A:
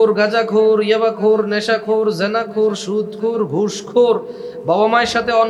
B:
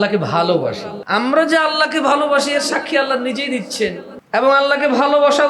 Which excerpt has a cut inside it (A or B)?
B